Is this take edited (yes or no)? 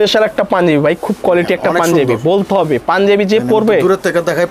no